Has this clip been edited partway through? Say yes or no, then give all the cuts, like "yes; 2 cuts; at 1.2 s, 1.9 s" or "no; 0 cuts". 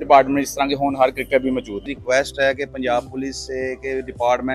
yes; 1 cut; at 1.9 s